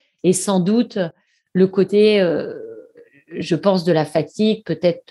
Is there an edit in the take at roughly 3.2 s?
no; 0 cuts

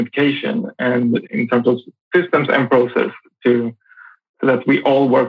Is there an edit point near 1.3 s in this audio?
yes; 1 cut; at 1.3 s

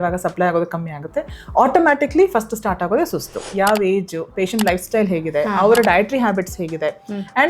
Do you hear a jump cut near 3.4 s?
yes; 1 cut; at 3.4 s

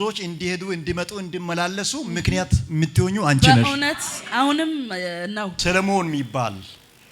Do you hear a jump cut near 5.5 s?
yes; 1 cut; at 5.5 s

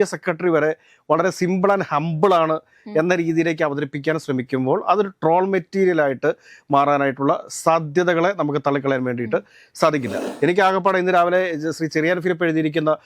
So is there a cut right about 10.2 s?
yes; 1 cut; at 10.2 s

